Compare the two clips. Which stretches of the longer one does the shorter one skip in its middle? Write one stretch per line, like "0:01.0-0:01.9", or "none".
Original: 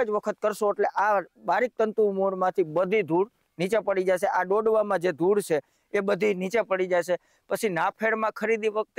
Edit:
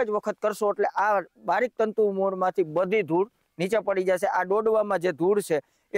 none